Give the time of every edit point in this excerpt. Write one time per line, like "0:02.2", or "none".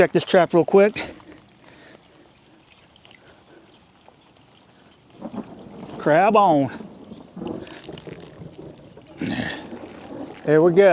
none